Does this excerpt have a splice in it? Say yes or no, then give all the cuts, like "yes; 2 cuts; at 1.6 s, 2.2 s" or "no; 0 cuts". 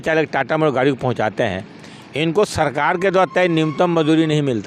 no; 0 cuts